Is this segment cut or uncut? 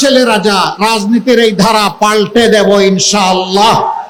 uncut